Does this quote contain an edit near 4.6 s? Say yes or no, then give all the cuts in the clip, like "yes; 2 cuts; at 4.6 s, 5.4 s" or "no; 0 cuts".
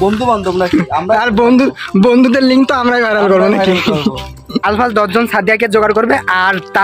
yes; 1 cut; at 4.6 s